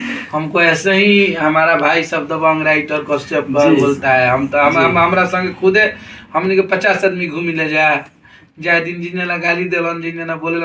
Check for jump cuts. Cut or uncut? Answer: uncut